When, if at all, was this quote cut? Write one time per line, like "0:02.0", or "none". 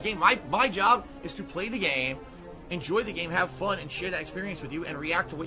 none